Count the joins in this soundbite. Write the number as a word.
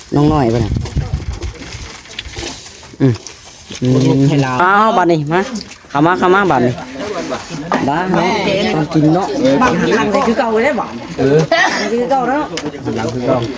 one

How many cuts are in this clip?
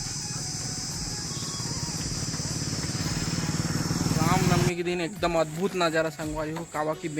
one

